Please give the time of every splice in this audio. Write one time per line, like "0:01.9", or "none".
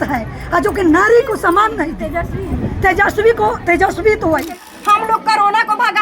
0:04.7